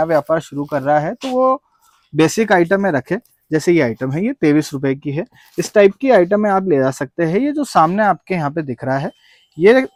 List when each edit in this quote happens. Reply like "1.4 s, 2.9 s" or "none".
none

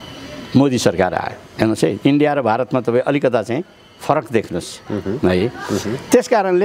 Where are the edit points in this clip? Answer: none

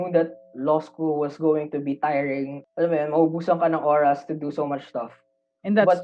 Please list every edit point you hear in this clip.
2.6 s

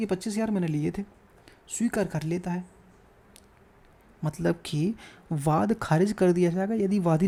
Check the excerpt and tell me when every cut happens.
none

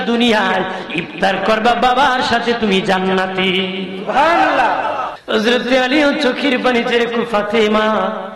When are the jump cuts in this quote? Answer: 5.1 s

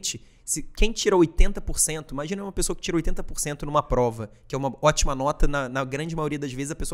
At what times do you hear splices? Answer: none

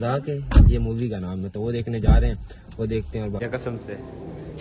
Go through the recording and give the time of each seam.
1.6 s, 3.4 s

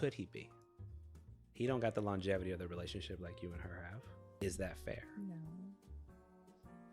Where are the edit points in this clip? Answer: 4.3 s

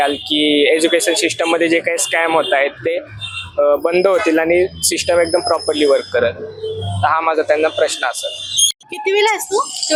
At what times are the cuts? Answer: none

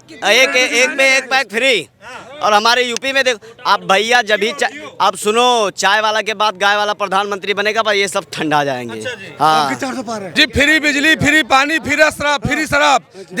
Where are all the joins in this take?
10.3 s

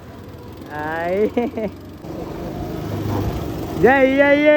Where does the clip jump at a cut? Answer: 2.0 s

